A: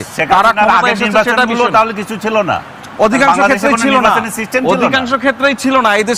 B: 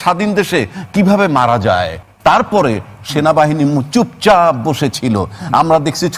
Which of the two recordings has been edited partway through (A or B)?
B